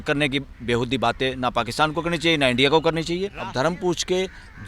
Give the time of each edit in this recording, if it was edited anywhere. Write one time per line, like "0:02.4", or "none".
0:03.4